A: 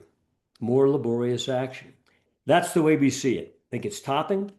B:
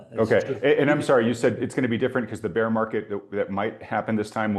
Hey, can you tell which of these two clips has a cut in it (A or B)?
A